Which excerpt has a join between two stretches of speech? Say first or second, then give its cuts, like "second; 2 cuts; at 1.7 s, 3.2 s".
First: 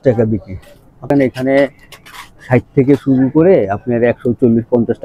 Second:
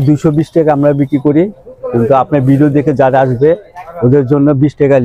first; 1 cut; at 1.1 s